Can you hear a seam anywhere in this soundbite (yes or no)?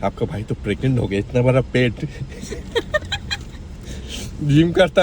yes